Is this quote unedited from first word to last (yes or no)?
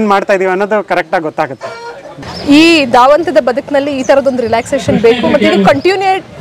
no